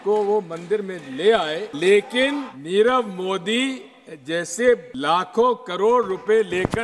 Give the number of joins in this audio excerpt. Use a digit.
3